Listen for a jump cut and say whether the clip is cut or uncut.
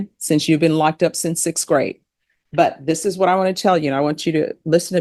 uncut